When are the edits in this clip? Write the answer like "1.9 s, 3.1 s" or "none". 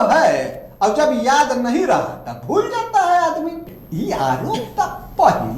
3.6 s